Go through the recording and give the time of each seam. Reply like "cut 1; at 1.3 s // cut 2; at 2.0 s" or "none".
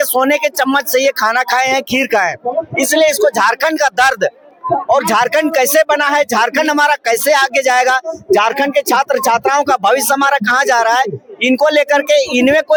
none